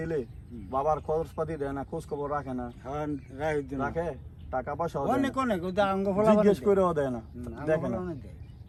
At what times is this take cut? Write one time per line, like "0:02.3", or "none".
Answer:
none